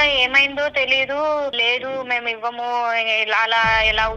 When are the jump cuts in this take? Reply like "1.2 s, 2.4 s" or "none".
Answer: 1.6 s

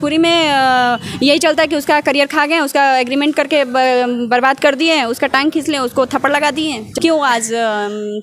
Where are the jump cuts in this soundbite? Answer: 6.9 s

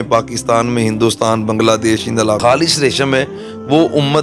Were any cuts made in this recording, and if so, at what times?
2.4 s

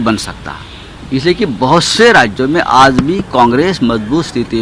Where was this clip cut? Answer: none

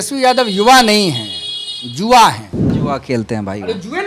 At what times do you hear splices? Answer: 2.7 s

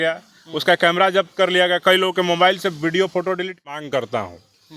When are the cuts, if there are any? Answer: 3.5 s

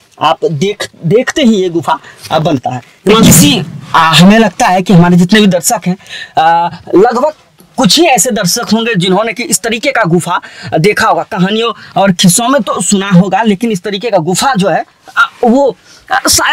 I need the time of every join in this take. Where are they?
3.2 s

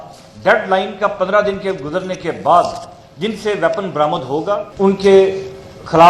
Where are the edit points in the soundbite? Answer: 4.7 s

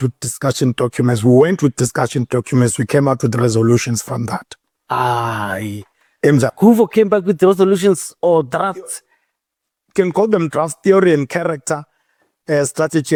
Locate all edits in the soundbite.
none

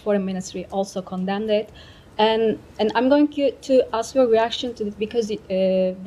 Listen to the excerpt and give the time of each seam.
none

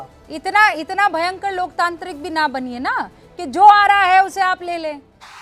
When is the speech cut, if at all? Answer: none

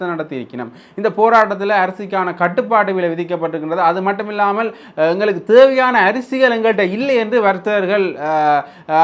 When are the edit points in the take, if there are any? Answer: none

